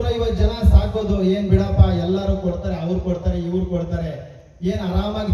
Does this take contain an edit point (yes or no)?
no